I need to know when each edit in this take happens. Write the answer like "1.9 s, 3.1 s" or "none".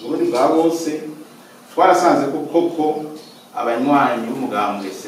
none